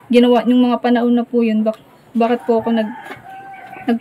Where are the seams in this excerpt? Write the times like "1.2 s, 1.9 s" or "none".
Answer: none